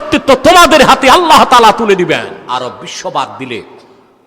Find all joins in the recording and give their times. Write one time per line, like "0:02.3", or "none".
0:02.4